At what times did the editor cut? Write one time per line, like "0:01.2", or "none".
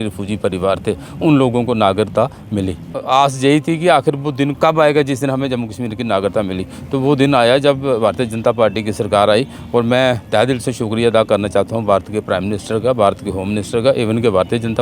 0:02.9